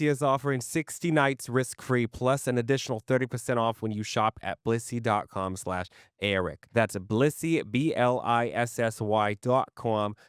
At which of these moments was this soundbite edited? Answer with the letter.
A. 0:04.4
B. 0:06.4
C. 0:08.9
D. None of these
D